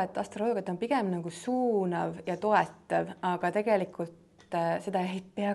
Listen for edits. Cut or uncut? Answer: uncut